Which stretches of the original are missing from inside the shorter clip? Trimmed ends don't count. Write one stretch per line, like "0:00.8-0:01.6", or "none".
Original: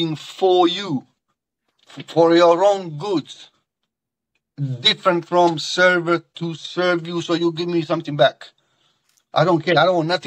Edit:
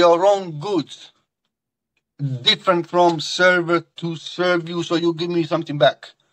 none